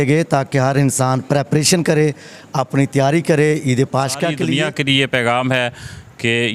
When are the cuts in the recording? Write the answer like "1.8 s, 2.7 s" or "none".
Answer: 4.4 s